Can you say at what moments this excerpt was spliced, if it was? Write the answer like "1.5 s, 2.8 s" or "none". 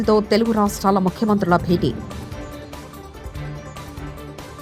none